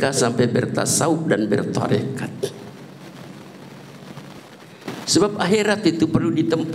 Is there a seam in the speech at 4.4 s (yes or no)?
yes